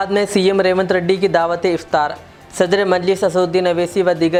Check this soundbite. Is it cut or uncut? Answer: uncut